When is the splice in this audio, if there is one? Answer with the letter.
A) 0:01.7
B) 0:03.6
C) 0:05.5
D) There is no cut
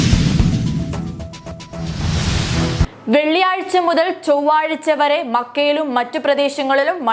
A